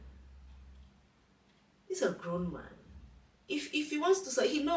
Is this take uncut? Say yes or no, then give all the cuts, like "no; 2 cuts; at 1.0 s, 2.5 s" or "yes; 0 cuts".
yes; 0 cuts